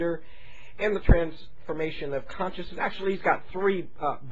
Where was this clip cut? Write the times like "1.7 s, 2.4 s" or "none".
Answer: none